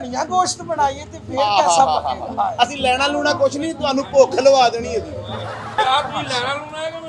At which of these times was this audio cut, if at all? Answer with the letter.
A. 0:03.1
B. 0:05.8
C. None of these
B